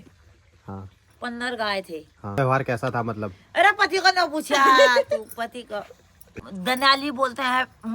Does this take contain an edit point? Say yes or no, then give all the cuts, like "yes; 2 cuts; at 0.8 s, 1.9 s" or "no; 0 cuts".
yes; 2 cuts; at 2.4 s, 6.2 s